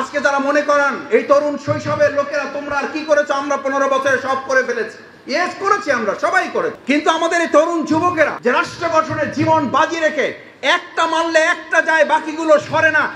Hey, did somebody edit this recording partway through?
yes; 1 cut; at 8.3 s

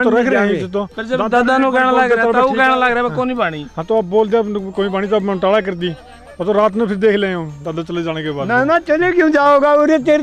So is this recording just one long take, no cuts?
yes; 0 cuts

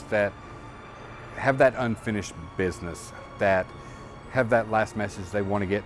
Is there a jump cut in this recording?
yes; 1 cut; at 3.2 s

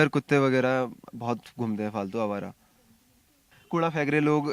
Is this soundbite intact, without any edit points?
no; 1 cut; at 3.5 s

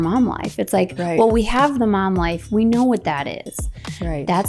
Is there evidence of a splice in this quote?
no; 0 cuts

